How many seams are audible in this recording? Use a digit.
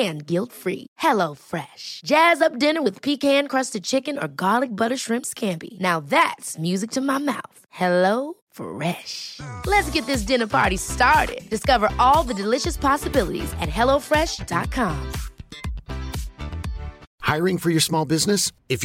1